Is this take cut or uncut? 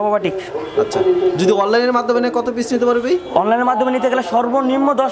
uncut